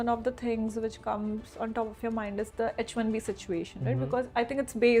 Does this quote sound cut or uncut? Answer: uncut